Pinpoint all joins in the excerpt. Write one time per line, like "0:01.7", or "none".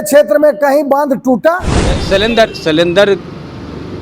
0:02.0